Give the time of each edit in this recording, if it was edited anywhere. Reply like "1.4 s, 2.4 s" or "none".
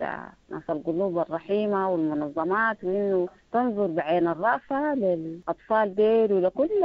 5.4 s